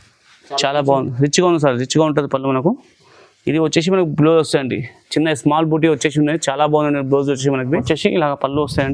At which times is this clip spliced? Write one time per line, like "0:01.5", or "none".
0:07.8